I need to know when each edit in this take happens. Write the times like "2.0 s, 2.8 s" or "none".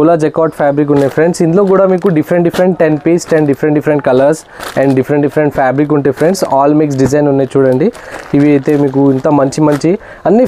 none